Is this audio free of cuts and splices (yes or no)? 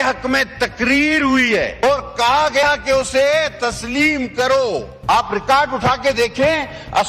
no